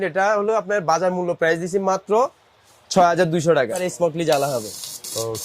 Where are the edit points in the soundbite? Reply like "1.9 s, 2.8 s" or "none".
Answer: 3.8 s